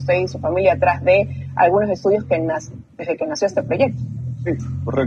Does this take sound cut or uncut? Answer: uncut